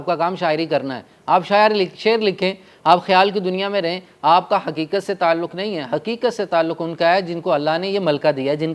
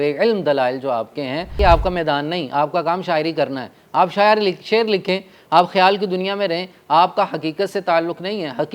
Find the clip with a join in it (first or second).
second